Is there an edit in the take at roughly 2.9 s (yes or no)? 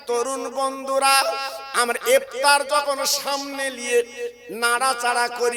no